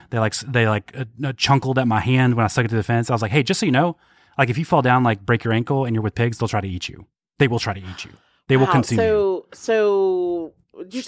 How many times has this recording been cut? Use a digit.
0